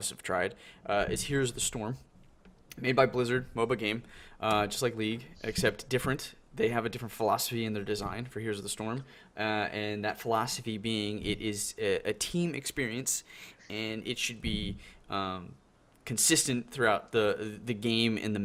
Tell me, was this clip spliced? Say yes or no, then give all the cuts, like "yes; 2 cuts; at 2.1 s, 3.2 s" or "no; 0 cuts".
no; 0 cuts